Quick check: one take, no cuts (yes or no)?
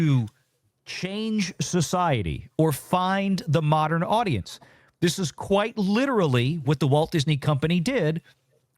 yes